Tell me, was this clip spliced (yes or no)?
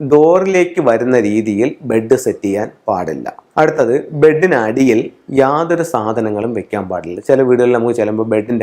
yes